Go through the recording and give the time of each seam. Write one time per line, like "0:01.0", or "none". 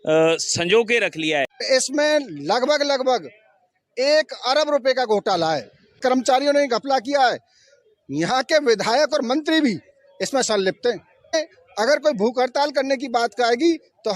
0:01.6
0:06.0
0:11.3